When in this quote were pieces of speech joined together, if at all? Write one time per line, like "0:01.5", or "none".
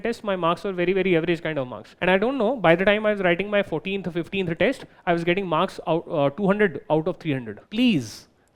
0:01.9
0:07.6